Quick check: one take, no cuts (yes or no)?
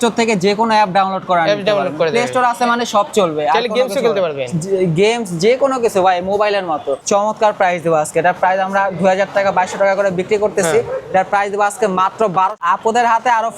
no